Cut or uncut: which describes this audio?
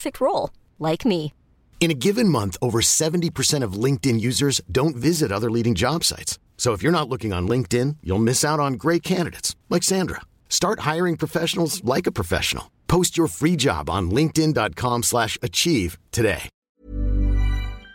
cut